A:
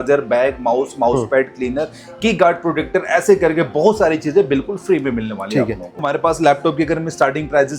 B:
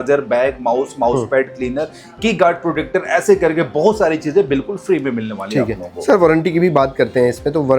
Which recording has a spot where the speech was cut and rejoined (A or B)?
A